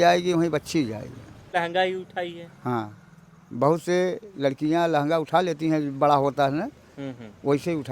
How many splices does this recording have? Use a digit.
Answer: 1